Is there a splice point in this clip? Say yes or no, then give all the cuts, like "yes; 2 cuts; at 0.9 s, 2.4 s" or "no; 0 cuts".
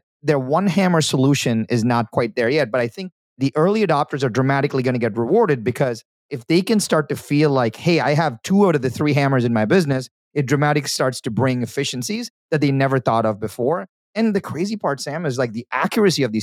yes; 1 cut; at 2.1 s